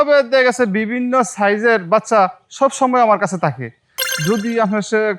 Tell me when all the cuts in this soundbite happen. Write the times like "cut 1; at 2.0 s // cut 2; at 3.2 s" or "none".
cut 1; at 3.9 s